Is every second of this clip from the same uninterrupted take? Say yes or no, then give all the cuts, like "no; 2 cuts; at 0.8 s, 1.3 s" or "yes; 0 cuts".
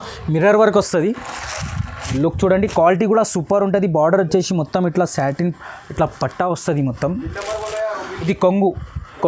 no; 2 cuts; at 2.1 s, 8.1 s